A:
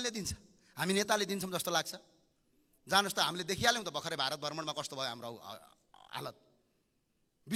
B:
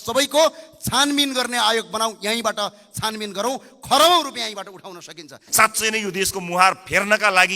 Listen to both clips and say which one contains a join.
B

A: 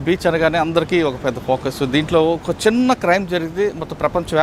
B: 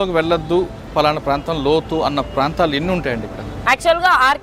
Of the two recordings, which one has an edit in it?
B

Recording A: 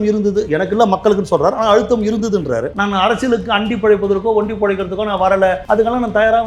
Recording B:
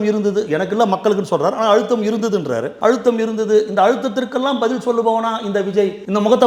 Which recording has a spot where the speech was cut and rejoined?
A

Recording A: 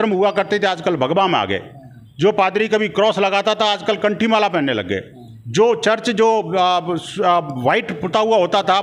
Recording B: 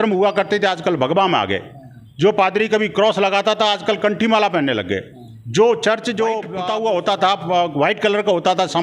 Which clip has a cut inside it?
B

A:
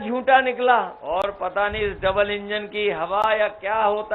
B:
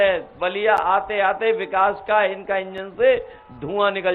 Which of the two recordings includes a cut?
A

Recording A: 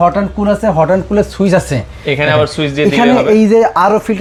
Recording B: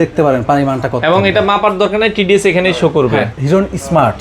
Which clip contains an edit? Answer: B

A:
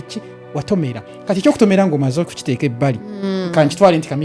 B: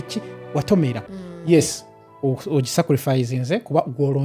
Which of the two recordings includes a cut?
B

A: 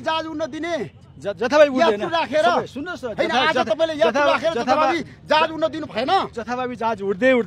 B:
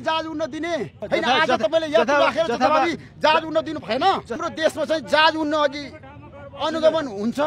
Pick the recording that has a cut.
B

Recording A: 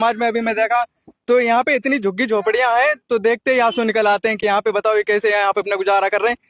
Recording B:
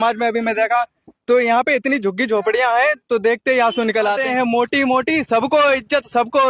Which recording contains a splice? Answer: B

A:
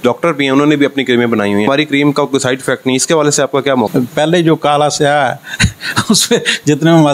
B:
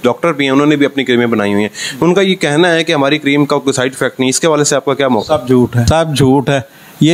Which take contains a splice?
A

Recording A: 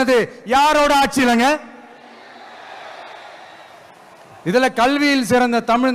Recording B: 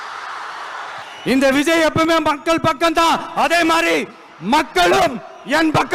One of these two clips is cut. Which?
B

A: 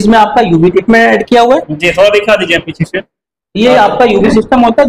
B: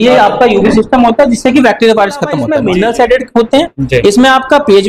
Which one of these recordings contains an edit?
B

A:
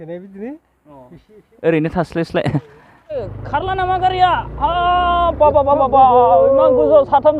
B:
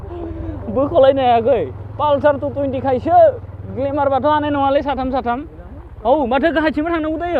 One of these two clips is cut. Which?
A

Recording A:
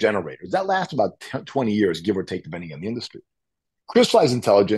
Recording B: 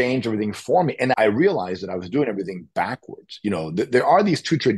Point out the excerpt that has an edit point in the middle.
B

